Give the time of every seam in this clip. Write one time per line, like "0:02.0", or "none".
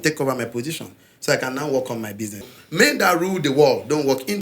0:02.4